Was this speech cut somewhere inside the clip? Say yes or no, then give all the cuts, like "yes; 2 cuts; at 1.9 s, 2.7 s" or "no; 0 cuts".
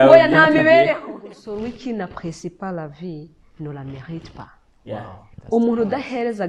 yes; 1 cut; at 1.0 s